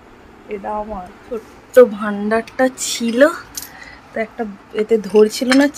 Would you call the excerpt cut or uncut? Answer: cut